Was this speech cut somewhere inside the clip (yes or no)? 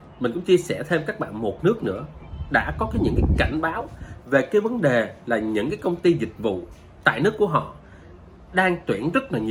no